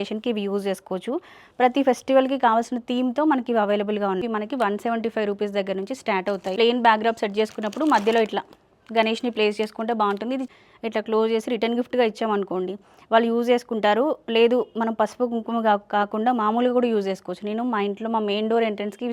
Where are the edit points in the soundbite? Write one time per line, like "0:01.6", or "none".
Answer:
0:04.2
0:06.5
0:10.5